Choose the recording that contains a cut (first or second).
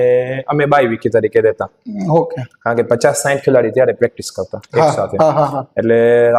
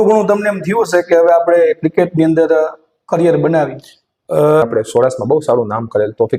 second